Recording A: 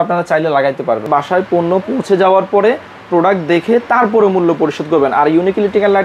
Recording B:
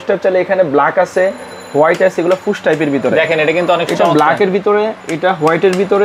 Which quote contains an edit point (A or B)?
A